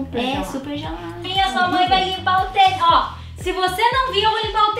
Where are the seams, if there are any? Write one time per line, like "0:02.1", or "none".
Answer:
0:01.3